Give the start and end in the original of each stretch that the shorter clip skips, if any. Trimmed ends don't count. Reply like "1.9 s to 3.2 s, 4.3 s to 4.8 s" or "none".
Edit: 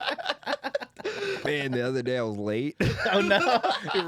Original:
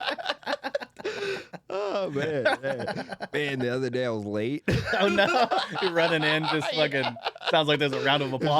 1.4 s to 3.3 s